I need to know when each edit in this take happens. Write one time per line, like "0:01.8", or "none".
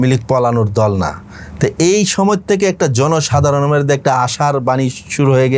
none